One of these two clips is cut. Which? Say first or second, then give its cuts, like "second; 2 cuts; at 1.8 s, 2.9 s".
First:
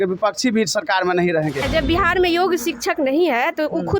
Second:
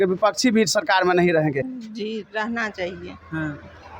first; 1 cut; at 1.6 s